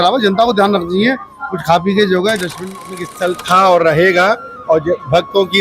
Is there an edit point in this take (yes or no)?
yes